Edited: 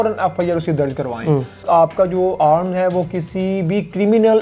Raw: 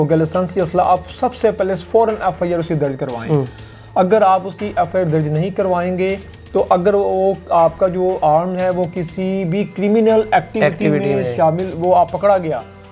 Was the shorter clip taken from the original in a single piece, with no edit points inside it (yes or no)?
no